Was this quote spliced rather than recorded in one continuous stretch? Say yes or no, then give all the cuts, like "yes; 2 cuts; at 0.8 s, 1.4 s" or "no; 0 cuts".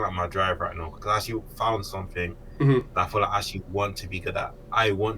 yes; 1 cut; at 0.9 s